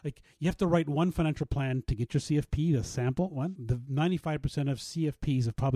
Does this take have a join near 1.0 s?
no; 1 cut; at 3.5 s

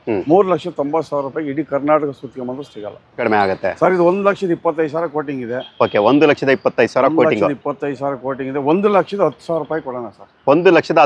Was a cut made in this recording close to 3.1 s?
yes; 1 cut; at 3.1 s

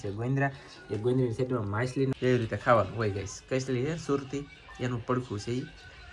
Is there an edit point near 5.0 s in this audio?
no; 1 cut; at 2.2 s

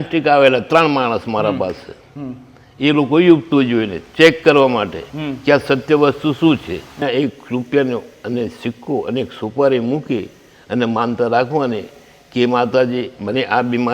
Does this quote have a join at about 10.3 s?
no; 1 cut; at 7.0 s

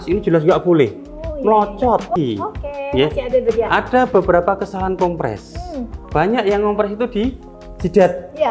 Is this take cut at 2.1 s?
yes; 1 cut; at 2.1 s

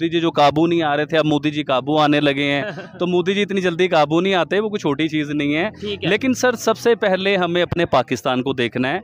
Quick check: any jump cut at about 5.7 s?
no; 0 cuts

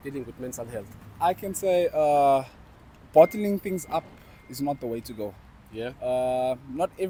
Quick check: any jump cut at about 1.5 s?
no; 0 cuts

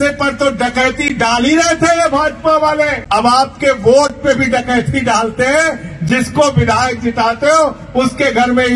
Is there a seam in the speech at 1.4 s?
no; 1 cut; at 3.0 s

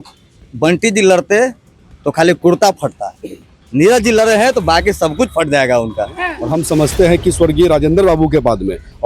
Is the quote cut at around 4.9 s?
no; 1 cut; at 6.3 s

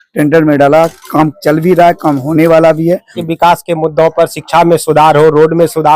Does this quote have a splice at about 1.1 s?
no; 1 cut; at 3.2 s

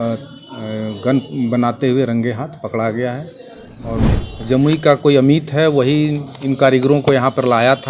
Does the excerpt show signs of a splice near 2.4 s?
no; 1 cut; at 4.1 s

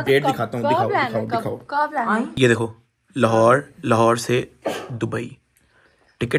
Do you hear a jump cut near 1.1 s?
no; 0 cuts

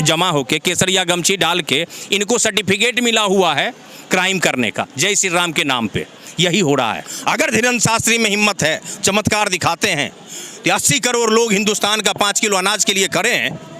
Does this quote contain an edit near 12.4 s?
no; 1 cut; at 7.1 s

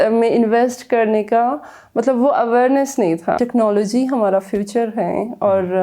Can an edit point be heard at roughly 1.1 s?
no; 1 cut; at 3.4 s

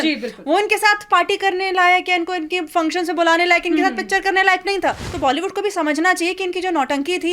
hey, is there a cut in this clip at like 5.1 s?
yes; 1 cut; at 5.1 s

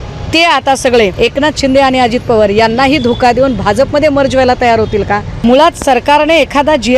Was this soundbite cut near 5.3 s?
yes; 2 cuts; at 1.1 s, 5.3 s

